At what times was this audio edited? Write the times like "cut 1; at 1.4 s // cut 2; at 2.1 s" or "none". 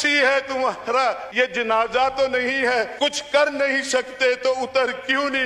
cut 1; at 1.2 s // cut 2; at 2.9 s